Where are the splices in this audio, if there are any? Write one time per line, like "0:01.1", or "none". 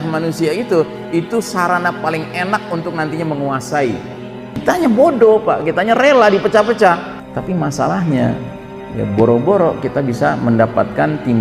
0:04.6
0:07.1